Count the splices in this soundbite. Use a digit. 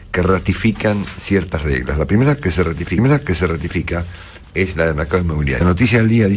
1